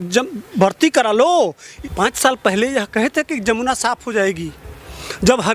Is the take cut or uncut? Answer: cut